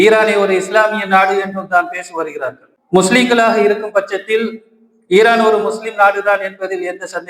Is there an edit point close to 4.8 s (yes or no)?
no